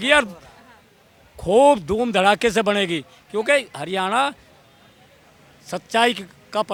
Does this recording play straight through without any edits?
yes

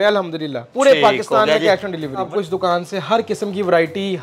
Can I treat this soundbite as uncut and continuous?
no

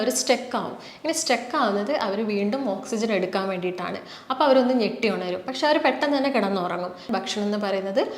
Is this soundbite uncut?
no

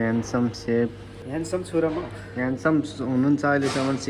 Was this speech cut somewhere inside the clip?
yes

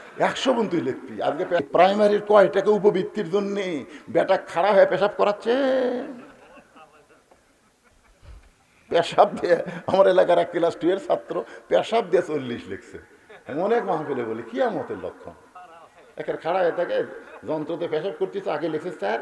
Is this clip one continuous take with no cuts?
no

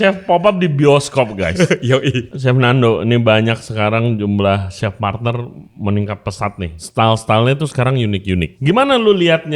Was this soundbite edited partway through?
yes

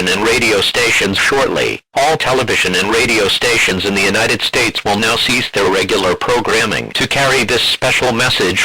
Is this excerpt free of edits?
yes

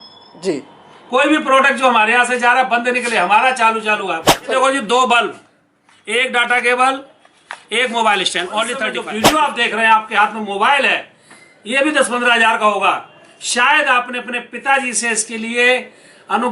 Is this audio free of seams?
no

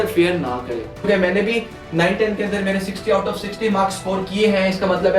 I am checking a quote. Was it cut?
yes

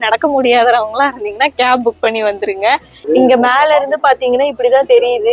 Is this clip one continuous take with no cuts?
no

